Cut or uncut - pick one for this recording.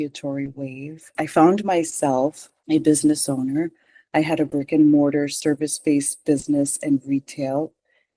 cut